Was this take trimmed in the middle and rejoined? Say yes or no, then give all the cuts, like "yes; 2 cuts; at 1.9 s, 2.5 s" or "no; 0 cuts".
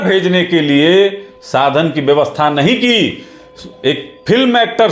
no; 0 cuts